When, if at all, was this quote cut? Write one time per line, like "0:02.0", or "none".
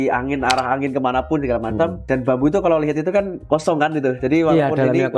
0:02.0
0:03.4